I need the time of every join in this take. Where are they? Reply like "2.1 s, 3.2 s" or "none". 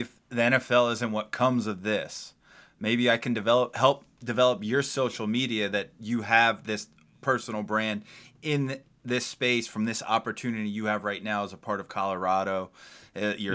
none